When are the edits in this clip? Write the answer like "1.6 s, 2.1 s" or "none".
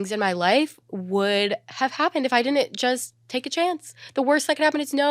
none